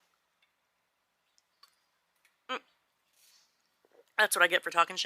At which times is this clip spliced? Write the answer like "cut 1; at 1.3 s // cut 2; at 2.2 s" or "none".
none